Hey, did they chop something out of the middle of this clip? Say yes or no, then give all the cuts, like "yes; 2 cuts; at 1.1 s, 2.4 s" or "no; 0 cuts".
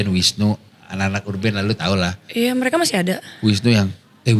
no; 0 cuts